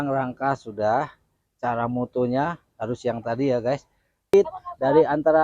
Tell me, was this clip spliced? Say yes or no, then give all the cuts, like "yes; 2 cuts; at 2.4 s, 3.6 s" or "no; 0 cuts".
yes; 1 cut; at 4.3 s